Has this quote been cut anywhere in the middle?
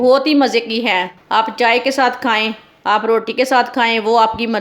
no; 0 cuts

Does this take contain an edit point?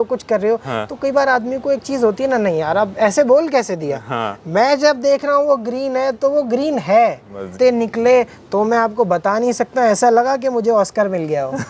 yes; 1 cut; at 7.5 s

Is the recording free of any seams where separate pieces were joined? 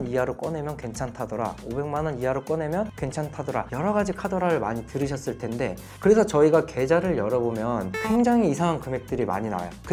yes; 0 cuts

